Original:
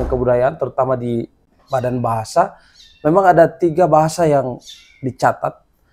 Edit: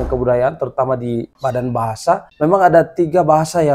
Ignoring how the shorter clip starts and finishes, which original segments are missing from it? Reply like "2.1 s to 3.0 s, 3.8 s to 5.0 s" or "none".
1.3 s to 1.6 s, 2.6 s to 2.9 s